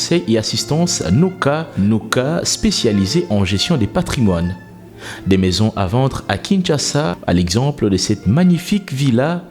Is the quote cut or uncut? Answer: uncut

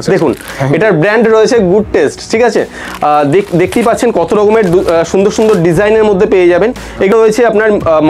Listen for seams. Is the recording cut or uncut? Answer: cut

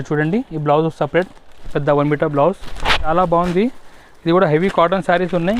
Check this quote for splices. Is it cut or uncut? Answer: cut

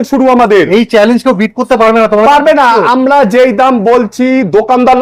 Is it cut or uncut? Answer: uncut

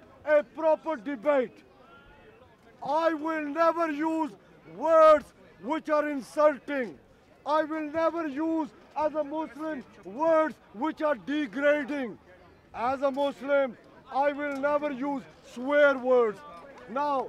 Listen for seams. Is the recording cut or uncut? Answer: uncut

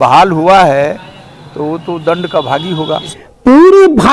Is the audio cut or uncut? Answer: cut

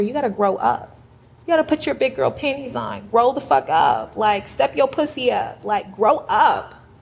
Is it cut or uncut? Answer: uncut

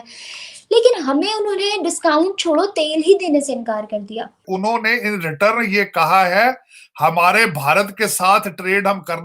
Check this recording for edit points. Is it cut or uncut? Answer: cut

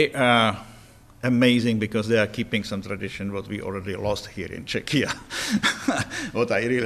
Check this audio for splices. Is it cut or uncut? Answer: uncut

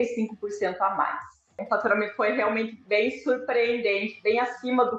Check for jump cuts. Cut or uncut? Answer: cut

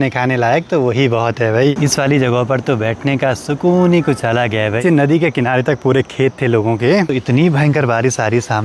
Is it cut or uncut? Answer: cut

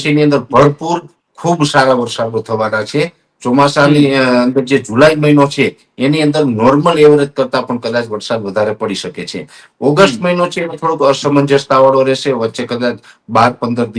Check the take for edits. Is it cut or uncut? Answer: uncut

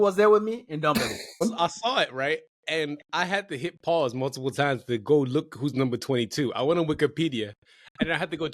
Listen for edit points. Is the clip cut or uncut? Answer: cut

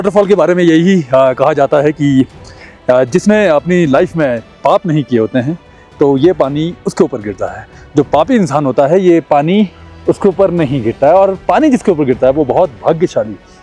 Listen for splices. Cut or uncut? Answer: uncut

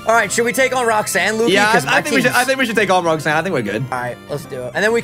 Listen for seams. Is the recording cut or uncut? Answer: cut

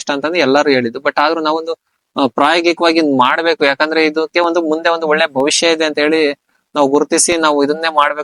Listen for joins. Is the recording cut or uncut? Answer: uncut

